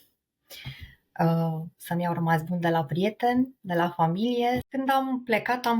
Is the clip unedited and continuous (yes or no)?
no